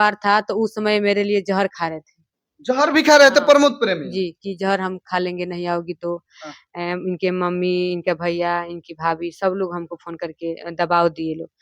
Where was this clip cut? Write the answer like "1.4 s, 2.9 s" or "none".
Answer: none